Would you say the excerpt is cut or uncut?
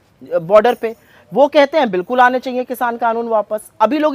uncut